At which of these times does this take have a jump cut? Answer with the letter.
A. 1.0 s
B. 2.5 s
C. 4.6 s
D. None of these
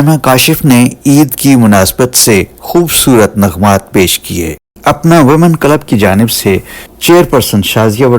C